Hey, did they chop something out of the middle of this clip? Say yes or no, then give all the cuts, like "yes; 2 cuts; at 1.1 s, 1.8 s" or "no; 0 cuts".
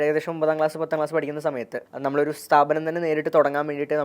yes; 1 cut; at 1.8 s